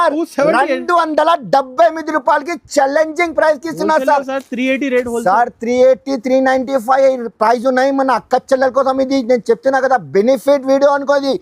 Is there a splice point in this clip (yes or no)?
no